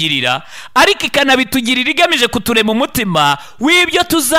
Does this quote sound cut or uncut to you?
uncut